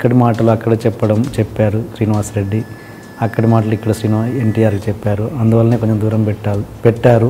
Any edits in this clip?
no; 0 cuts

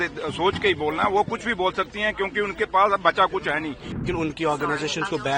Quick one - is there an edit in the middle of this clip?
yes; 1 cut; at 3.9 s

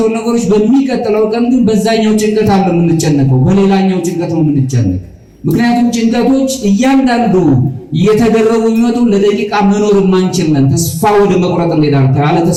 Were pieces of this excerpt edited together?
no; 0 cuts

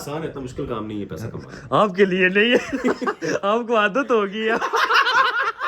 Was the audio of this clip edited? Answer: no; 0 cuts

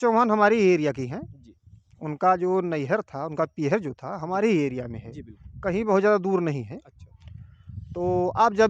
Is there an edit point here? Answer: no; 0 cuts

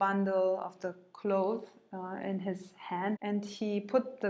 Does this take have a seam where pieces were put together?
yes; 1 cut; at 3.2 s

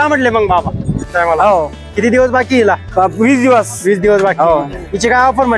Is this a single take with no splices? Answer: no; 1 cut; at 1.1 s

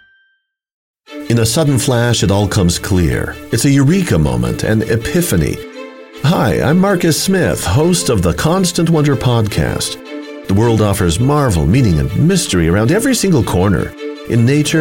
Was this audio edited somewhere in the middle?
yes; 1 cut; at 0.9 s

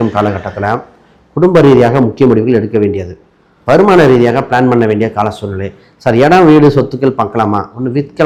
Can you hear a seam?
no; 0 cuts

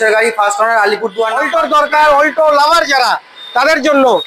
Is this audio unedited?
no; 1 cut; at 1.4 s

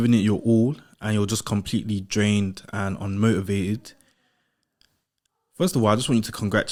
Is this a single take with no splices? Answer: yes; 0 cuts

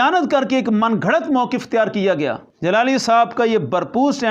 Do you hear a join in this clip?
yes; 1 cut; at 2.5 s

